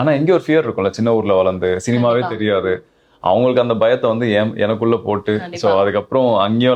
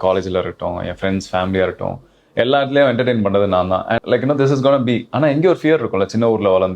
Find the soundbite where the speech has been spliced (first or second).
second